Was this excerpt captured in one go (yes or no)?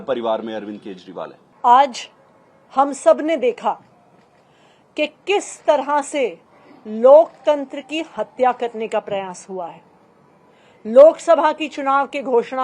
yes